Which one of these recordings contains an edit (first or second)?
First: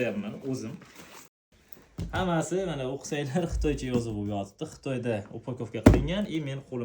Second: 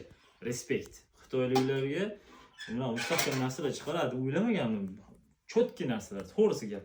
first